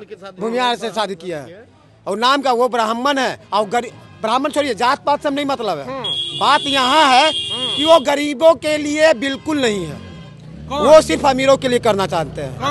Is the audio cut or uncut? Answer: uncut